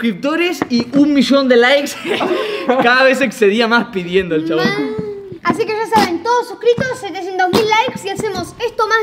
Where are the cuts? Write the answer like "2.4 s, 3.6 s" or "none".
none